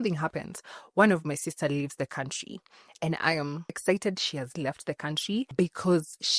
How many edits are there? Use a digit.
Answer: 2